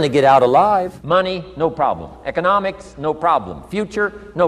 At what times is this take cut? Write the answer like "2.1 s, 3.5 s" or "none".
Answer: 1.0 s